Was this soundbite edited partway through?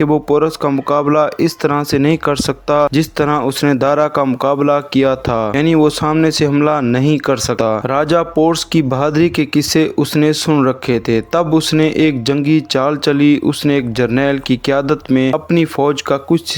no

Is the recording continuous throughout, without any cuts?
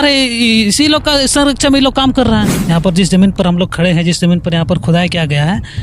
no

